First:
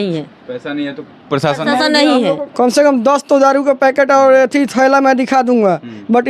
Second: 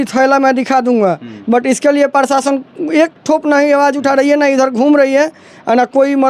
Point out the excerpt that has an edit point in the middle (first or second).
first